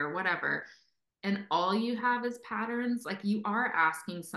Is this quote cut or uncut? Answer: uncut